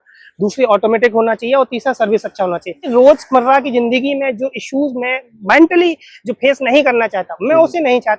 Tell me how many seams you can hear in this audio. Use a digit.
1